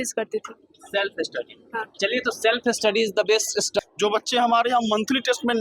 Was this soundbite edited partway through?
yes; 1 cut; at 3.8 s

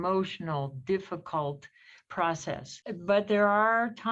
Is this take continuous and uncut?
no; 1 cut; at 2.8 s

